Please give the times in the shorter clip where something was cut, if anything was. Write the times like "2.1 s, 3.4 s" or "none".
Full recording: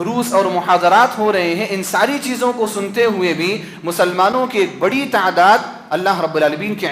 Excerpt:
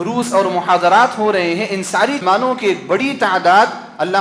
2.2 s